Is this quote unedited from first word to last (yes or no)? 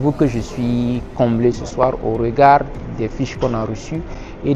yes